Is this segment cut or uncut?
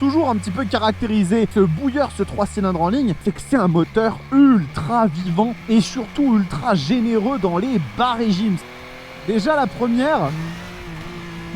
cut